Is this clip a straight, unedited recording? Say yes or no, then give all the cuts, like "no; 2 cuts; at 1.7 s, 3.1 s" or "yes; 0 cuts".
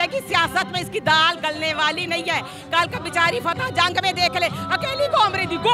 yes; 0 cuts